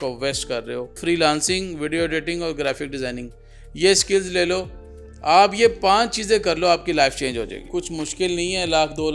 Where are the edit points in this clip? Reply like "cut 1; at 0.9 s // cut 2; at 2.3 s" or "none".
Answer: cut 1; at 1.0 s // cut 2; at 7.7 s

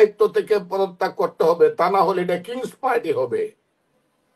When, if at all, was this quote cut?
none

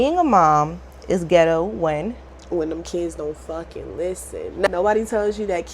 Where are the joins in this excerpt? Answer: cut 1; at 2.3 s // cut 2; at 4.7 s

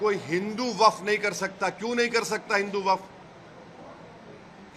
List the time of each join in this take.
none

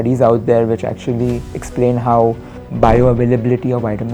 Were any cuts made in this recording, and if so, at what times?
cut 1; at 2.6 s

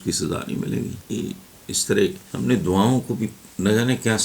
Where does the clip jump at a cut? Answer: cut 1; at 1.0 s // cut 2; at 2.3 s

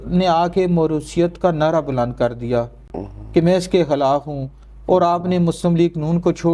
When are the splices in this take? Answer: none

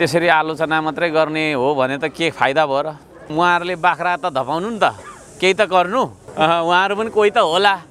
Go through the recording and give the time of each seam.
cut 1; at 3.2 s // cut 2; at 6.2 s

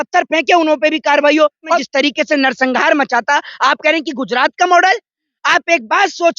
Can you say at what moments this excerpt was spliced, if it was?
cut 1; at 1.8 s

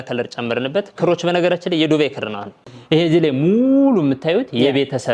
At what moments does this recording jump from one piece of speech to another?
cut 1; at 2.7 s

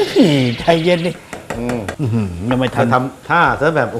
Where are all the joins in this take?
cut 1; at 1.9 s

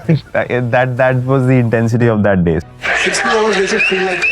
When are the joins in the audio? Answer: cut 1; at 2.6 s

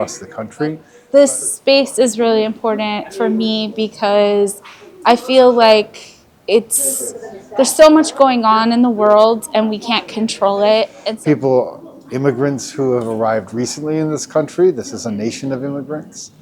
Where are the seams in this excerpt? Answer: cut 1; at 0.9 s // cut 2; at 11.0 s

